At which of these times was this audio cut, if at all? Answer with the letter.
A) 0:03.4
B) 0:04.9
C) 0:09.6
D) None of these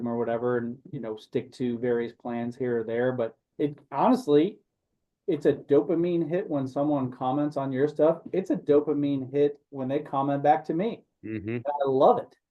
A